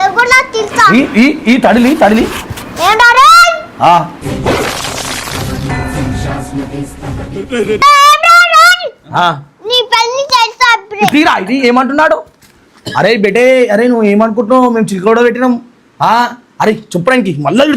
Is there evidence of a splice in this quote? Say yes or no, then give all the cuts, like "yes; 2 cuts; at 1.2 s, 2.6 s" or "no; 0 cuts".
yes; 1 cut; at 7.8 s